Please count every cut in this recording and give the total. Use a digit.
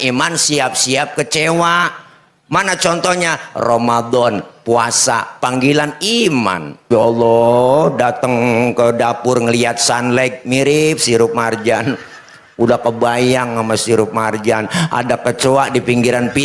1